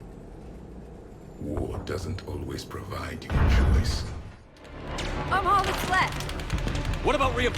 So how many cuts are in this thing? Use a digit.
1